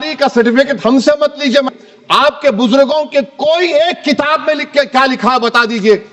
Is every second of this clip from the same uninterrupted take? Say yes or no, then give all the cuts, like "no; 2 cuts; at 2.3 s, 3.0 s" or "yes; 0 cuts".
no; 1 cut; at 1.7 s